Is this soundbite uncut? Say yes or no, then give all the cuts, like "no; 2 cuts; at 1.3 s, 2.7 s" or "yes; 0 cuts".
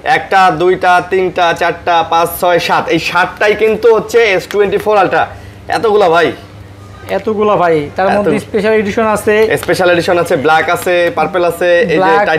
yes; 0 cuts